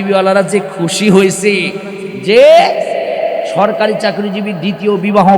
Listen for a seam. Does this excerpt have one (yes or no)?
no